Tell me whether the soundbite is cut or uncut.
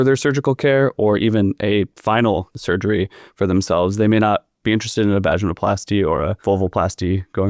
cut